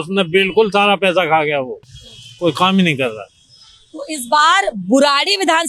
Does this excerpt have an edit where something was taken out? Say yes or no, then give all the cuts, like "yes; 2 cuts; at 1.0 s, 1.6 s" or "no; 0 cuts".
no; 0 cuts